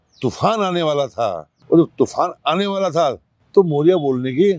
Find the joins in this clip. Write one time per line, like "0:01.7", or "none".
0:01.5
0:03.3